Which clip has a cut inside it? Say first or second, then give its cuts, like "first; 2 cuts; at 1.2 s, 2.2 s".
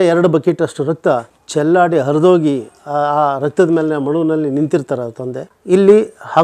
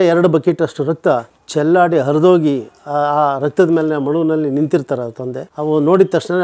first; 1 cut; at 5.5 s